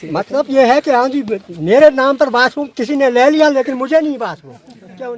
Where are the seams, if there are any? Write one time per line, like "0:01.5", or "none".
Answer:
none